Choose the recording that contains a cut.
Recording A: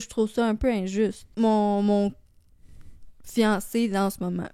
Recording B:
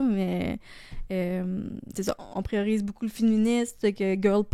A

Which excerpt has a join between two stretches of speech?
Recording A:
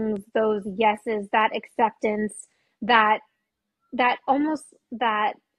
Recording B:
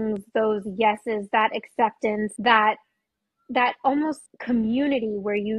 B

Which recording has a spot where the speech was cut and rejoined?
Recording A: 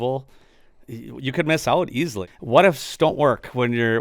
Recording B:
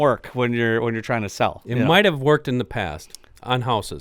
A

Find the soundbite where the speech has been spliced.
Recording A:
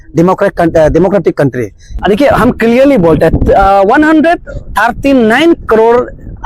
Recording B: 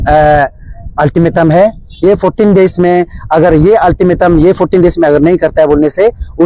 A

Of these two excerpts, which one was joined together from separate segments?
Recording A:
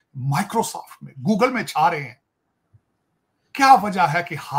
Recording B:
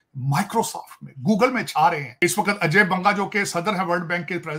B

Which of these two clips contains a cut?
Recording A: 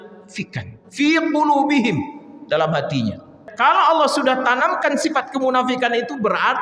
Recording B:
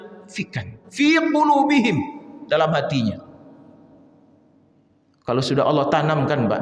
A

